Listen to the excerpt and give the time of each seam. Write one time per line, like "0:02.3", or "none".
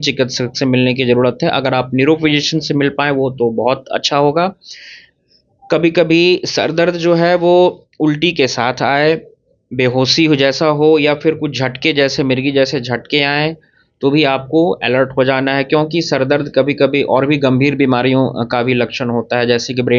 none